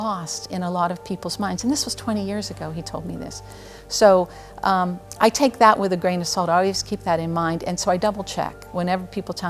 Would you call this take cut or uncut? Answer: uncut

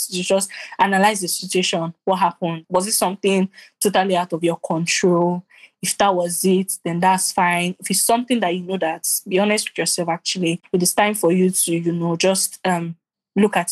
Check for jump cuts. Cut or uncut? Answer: cut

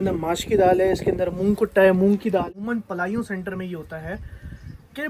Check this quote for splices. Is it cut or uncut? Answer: cut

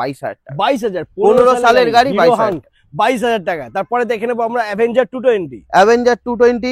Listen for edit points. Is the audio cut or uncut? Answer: uncut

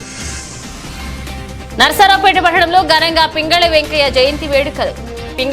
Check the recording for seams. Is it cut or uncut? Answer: cut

